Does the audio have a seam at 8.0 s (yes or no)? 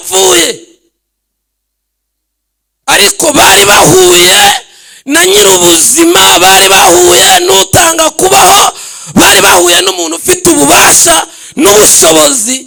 no